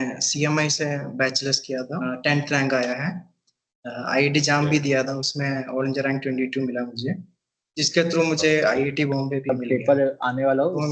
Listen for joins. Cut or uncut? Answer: cut